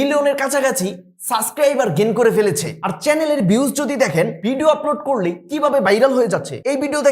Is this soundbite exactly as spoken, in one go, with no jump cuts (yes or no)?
yes